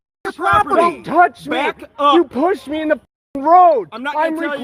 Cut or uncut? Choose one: uncut